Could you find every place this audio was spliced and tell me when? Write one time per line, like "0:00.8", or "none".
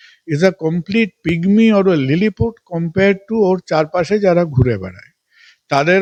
none